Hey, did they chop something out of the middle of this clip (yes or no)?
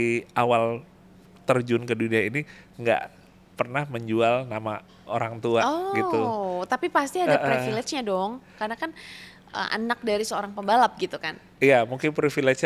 no